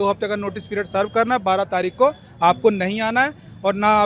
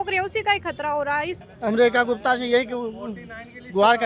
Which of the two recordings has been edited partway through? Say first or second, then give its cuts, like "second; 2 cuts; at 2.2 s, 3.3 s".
second; 1 cut; at 1.4 s